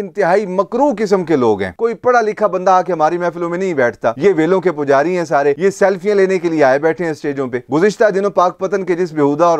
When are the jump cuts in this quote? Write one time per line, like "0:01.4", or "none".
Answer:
0:01.7
0:04.1
0:07.7

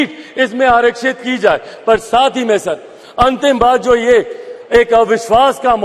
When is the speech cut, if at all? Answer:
none

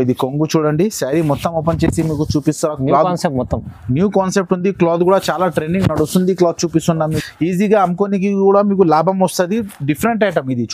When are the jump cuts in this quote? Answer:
0:07.2

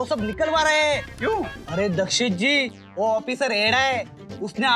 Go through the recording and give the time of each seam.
0:01.6

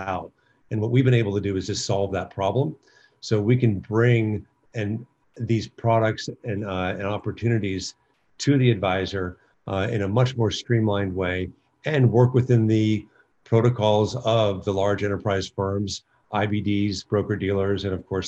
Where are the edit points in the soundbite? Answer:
none

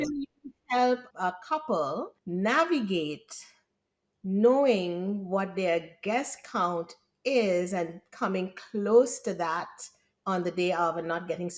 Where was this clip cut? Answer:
0:01.1
0:02.2

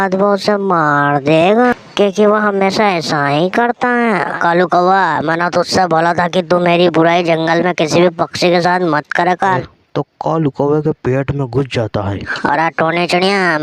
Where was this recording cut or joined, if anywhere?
0:04.4
0:09.6
0:12.3

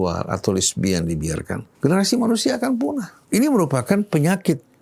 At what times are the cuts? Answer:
0:01.6
0:03.1

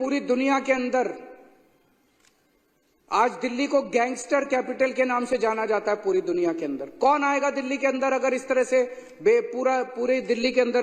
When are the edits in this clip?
none

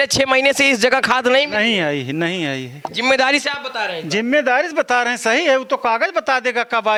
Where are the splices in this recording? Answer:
none

